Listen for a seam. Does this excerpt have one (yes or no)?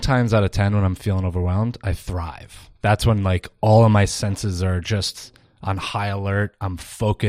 no